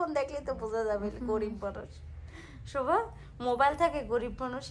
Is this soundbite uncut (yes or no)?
yes